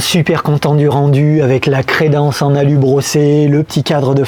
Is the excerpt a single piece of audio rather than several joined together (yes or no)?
yes